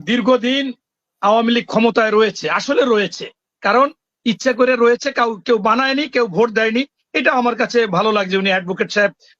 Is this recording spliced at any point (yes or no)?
no